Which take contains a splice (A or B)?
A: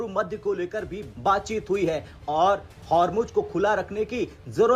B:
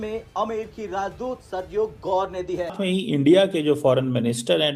B